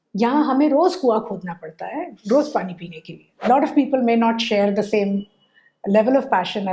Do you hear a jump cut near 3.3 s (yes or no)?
yes